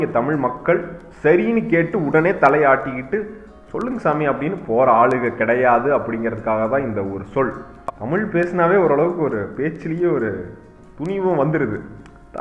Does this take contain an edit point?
yes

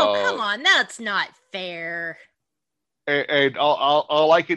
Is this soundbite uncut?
no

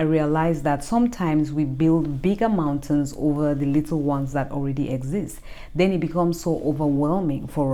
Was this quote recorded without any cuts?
yes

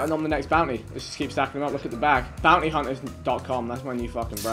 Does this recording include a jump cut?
yes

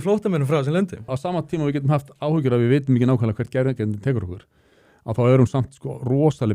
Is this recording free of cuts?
no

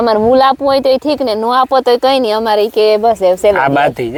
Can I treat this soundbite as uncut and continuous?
yes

